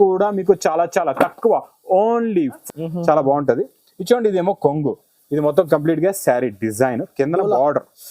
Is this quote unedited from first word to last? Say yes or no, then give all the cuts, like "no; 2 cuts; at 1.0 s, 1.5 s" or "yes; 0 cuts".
no; 1 cut; at 2.6 s